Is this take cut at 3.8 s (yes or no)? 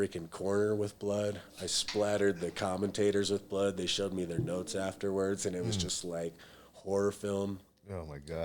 no